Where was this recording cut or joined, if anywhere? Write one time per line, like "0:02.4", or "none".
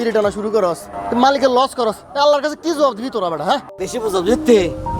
0:00.9
0:03.7